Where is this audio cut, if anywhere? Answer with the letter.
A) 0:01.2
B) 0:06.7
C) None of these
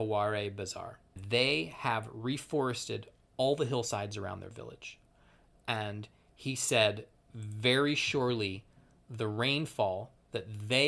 A